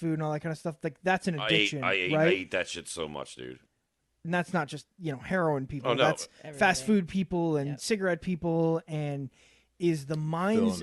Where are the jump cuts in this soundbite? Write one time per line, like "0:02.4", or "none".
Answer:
0:03.9